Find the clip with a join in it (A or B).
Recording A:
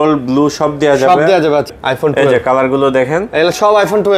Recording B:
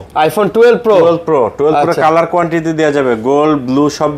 A